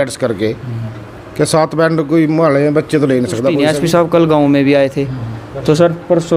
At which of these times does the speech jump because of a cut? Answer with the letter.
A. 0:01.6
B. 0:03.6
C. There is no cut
B